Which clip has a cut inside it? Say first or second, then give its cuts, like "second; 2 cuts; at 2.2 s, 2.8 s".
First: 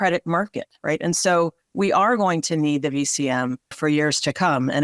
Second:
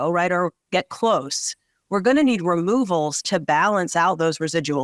first; 2 cuts; at 1.6 s, 3.8 s